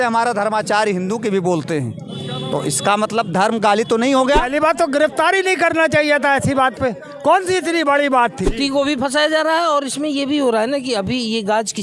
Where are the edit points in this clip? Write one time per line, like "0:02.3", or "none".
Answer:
0:04.5
0:08.5